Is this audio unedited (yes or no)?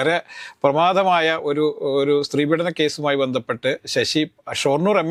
yes